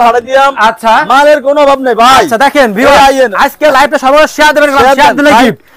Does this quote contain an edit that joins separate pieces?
no; 0 cuts

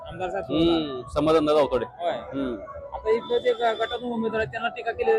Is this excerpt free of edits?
yes; 0 cuts

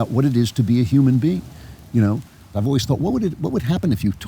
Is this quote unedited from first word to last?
no; 1 cut; at 2.5 s

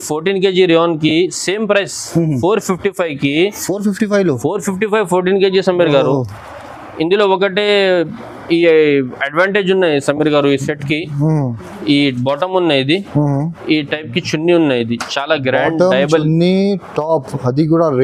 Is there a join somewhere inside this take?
no; 0 cuts

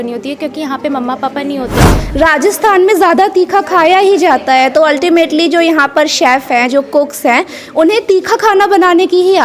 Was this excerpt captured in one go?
no; 1 cut; at 2.0 s

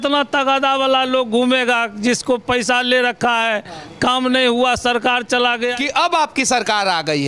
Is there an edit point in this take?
yes; 1 cut; at 5.7 s

